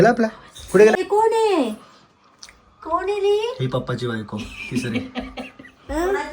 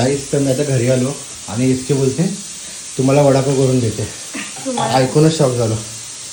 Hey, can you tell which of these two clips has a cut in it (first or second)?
first